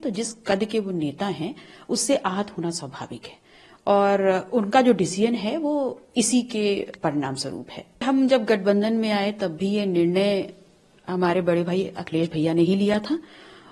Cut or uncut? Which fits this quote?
cut